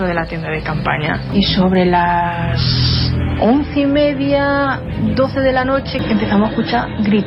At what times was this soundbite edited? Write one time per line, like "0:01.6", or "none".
0:01.3
0:06.0